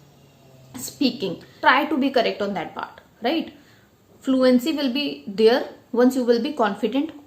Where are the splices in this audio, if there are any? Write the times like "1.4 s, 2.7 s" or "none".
1.5 s